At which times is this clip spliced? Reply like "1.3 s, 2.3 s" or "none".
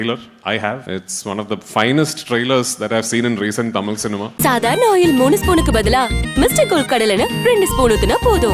0.8 s, 4.3 s